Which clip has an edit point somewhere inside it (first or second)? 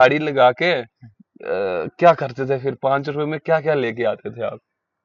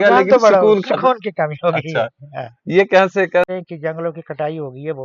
second